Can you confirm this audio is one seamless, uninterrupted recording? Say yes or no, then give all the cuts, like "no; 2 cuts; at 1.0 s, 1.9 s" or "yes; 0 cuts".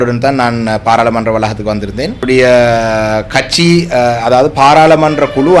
no; 1 cut; at 2.2 s